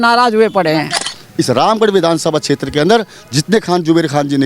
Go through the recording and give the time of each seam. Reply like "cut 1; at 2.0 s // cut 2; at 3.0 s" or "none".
cut 1; at 1.0 s